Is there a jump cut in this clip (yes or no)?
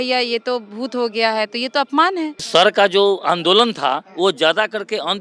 yes